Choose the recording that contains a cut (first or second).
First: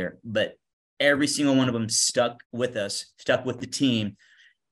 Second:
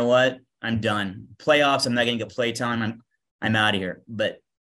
first